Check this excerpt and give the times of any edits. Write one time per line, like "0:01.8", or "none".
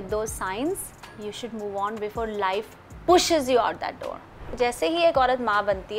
0:01.2
0:04.4